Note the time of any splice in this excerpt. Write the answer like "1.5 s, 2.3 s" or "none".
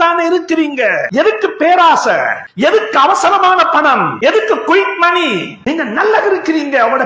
1.1 s, 2.4 s, 4.1 s, 5.5 s